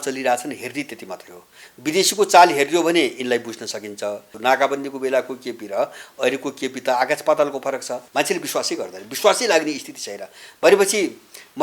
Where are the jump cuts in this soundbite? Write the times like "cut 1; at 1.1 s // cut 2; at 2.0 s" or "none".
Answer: cut 1; at 4.3 s // cut 2; at 8.0 s